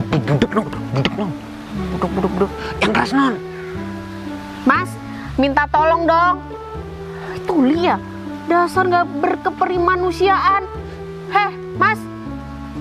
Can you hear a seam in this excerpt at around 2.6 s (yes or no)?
yes